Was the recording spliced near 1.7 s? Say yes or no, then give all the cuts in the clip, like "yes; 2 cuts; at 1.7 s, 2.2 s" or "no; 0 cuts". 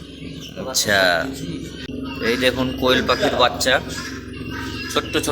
yes; 1 cut; at 1.7 s